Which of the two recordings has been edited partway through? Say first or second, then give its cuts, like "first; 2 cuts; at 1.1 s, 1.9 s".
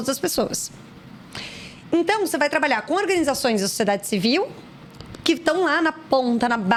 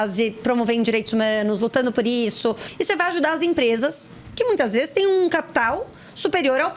second; 1 cut; at 2.7 s